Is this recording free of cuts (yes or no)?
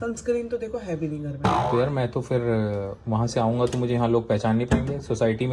yes